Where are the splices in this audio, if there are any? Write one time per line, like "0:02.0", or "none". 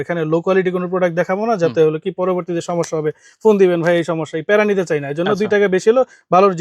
none

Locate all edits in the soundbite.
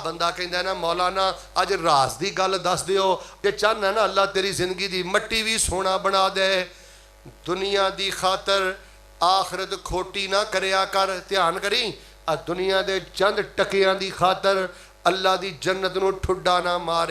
0:03.3

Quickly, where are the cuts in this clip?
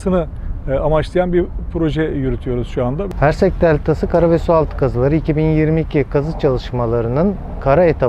0:03.1

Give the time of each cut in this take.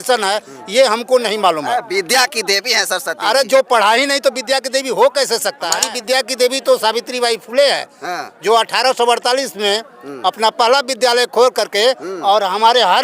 0:05.8

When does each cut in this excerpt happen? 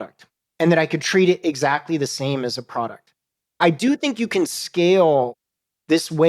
0:03.6

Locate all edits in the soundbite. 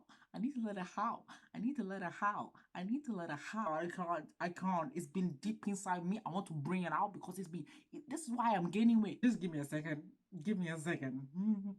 0:03.6
0:09.2

